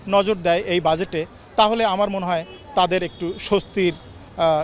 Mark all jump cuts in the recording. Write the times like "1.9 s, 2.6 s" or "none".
none